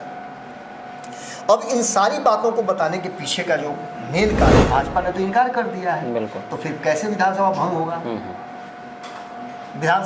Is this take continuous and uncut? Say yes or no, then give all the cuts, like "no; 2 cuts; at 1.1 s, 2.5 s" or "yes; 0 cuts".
no; 1 cut; at 4.6 s